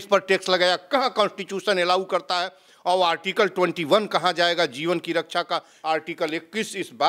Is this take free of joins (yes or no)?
no